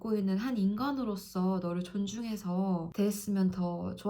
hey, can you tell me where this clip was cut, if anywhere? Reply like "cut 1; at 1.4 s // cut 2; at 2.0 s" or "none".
cut 1; at 2.9 s